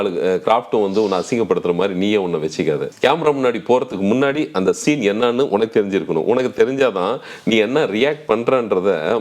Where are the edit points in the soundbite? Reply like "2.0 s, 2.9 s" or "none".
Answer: 2.9 s